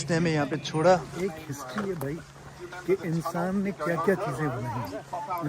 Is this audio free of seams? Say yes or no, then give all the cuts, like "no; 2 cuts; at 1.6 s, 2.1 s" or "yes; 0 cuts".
no; 1 cut; at 1.1 s